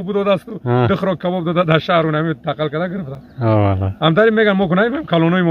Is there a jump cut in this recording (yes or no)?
no